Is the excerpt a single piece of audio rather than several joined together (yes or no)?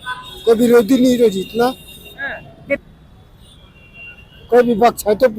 no